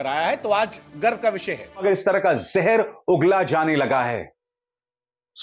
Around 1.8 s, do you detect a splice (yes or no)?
yes